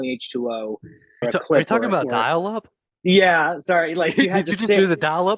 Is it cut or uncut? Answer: cut